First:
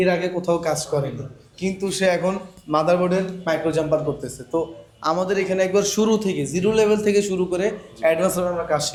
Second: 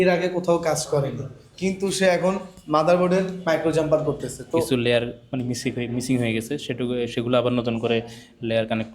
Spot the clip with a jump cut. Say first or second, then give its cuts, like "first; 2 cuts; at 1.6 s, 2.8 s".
second; 1 cut; at 4.7 s